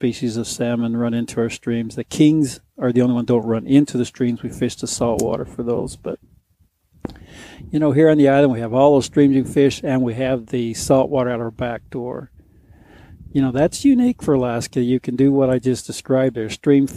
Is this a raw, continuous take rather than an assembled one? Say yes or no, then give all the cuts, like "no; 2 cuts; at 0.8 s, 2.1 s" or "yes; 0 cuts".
yes; 0 cuts